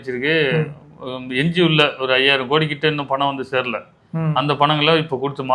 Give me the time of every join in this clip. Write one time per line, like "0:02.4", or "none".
none